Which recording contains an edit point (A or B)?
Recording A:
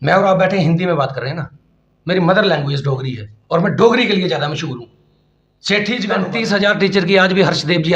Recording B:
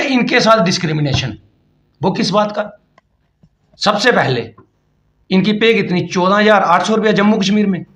A